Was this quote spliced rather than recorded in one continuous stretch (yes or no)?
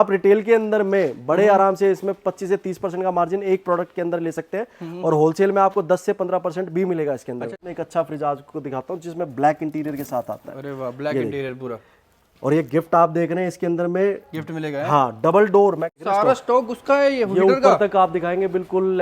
yes